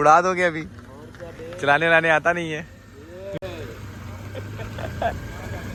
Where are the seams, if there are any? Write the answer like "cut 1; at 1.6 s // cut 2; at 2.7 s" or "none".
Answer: none